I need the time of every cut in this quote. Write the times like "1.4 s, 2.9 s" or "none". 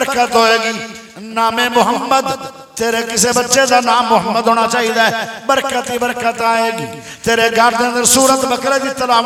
none